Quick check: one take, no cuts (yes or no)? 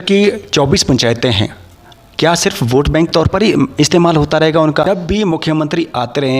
no